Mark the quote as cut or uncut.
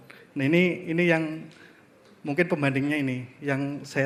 uncut